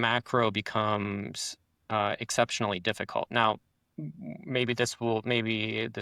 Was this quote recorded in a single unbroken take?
yes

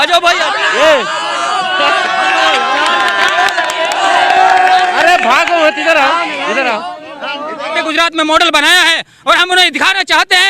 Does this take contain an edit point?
yes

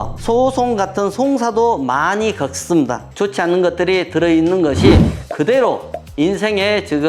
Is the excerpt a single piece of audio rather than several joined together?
no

